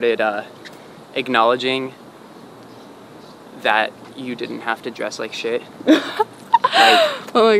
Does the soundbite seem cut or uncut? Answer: uncut